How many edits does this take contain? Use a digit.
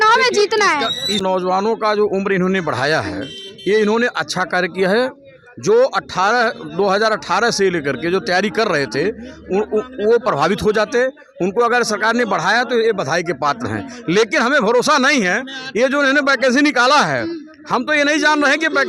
1